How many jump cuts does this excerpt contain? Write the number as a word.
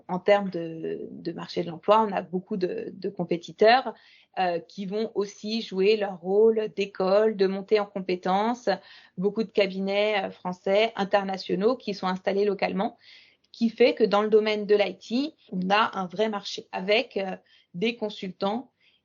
two